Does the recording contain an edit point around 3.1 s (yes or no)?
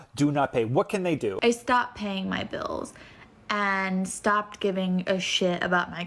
no